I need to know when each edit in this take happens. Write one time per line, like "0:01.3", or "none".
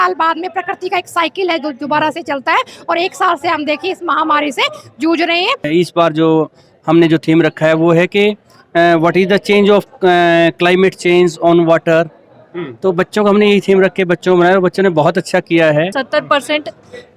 0:05.7
0:16.0